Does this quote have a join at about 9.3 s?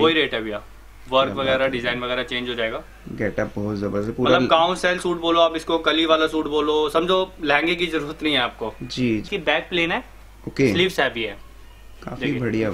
yes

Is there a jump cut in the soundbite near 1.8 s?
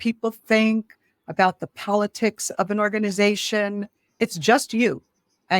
no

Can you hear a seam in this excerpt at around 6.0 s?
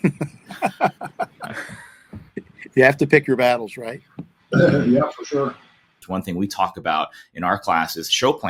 yes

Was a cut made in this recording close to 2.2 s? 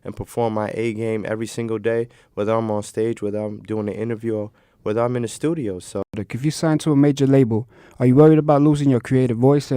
no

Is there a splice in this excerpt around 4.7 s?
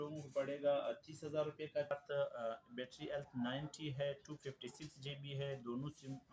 no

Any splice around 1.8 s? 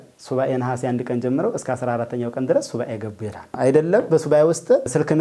no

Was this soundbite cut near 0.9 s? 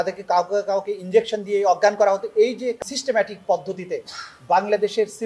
no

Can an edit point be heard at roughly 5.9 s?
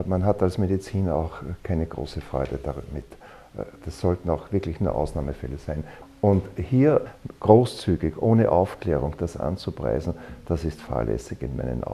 yes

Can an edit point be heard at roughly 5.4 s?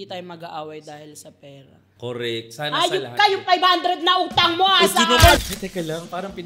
yes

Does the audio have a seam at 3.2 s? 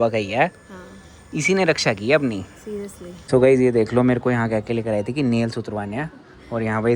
yes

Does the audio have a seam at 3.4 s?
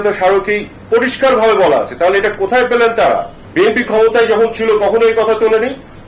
yes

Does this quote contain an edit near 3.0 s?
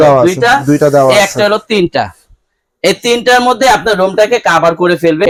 no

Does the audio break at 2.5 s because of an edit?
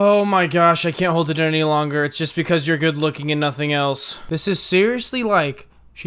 no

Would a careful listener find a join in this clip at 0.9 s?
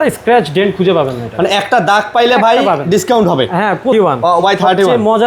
no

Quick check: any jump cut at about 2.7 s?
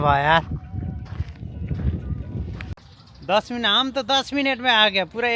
yes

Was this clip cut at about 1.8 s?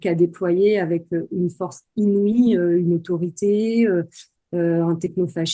no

